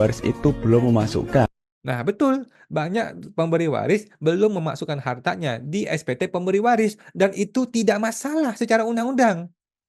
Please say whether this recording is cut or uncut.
uncut